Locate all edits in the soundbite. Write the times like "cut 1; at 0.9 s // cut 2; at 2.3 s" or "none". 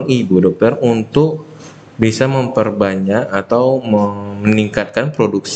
none